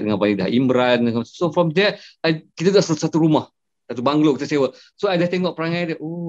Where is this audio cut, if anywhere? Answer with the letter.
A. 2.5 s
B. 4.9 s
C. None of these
C